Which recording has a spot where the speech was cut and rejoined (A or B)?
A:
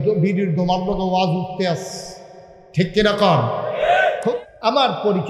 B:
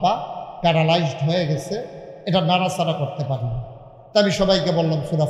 A